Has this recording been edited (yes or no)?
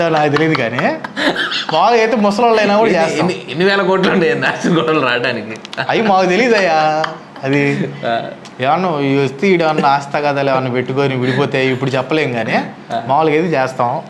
no